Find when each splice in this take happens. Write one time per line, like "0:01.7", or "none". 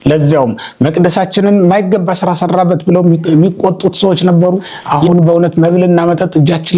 0:04.7